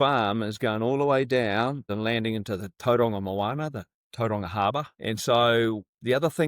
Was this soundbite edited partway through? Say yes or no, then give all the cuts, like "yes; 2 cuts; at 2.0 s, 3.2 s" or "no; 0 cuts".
yes; 2 cuts; at 1.9 s, 4.9 s